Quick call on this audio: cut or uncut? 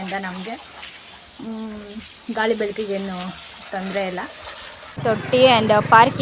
cut